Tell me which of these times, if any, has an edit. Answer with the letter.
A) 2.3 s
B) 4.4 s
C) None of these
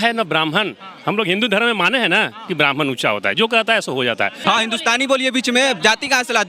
B